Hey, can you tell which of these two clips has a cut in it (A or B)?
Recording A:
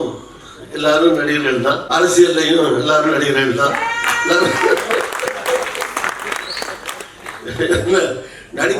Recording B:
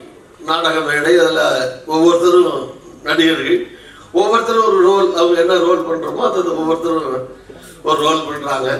A